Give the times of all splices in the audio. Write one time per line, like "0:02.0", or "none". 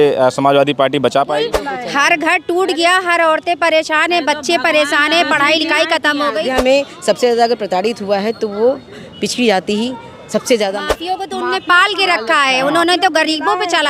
0:01.6
0:06.5
0:10.8